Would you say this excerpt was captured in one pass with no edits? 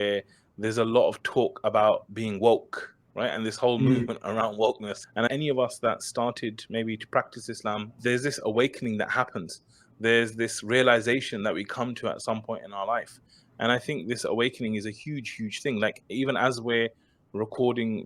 no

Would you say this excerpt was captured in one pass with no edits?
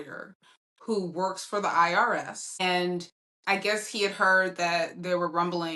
no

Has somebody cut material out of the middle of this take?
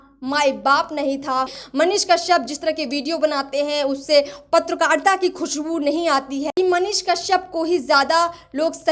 yes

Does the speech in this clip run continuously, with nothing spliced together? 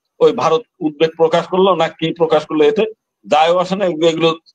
yes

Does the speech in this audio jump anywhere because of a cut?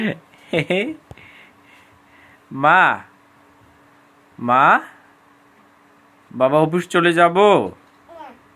no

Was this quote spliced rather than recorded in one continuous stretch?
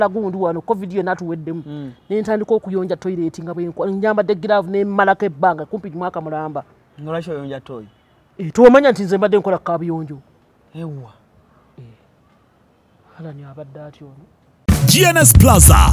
yes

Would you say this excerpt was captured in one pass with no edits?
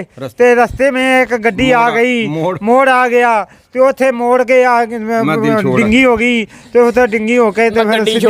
yes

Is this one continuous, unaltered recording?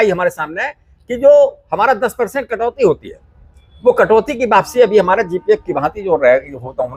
yes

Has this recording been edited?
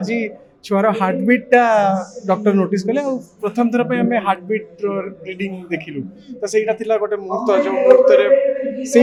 no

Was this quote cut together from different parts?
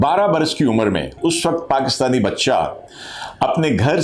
yes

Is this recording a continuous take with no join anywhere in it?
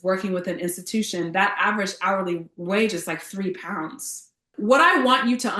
no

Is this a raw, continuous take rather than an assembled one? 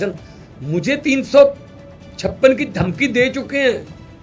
yes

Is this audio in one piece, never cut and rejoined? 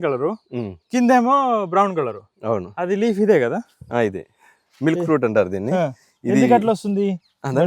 yes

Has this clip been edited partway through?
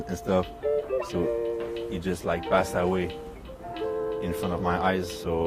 no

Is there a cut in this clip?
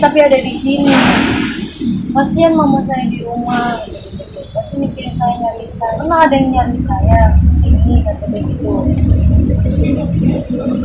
yes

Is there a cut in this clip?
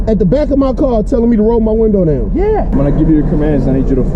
yes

